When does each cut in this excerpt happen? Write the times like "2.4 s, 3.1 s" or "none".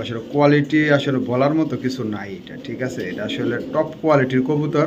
none

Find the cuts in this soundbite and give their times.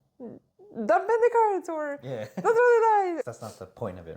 3.2 s

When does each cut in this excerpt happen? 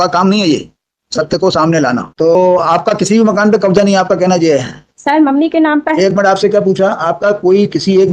2.3 s

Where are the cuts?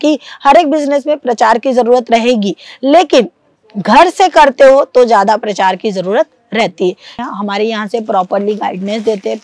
7.2 s

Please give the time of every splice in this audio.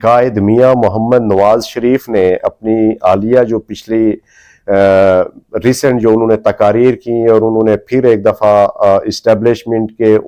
none

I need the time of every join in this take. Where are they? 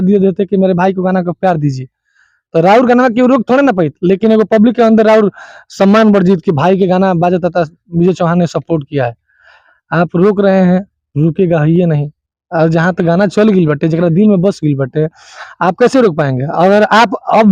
none

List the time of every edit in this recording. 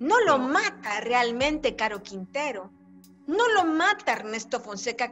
none

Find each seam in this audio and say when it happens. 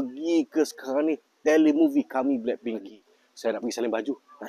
2.9 s

